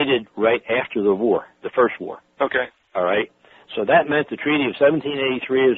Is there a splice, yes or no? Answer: yes